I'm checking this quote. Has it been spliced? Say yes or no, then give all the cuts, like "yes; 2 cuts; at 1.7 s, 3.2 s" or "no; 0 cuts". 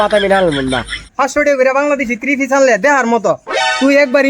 yes; 1 cut; at 1.0 s